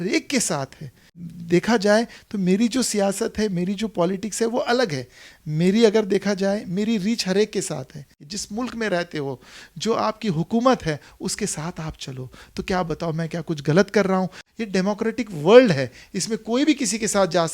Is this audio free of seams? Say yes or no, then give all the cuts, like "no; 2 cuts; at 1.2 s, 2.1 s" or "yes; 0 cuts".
no; 3 cuts; at 1.1 s, 8.3 s, 14.4 s